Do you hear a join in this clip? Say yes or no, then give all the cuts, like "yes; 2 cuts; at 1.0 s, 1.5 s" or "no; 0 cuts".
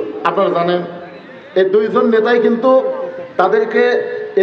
no; 0 cuts